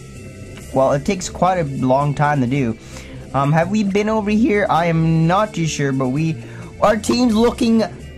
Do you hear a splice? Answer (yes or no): yes